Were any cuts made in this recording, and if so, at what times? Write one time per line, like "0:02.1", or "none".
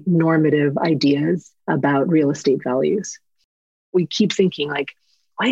0:01.5
0:03.7